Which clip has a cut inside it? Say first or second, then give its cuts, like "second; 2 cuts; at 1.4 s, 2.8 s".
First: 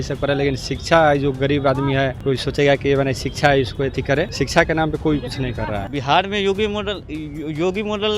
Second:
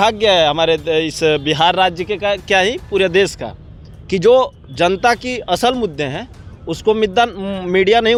first; 3 cuts; at 2.2 s, 4.3 s, 5.8 s